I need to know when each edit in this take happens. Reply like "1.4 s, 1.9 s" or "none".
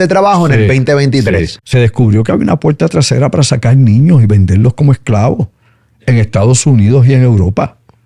1.6 s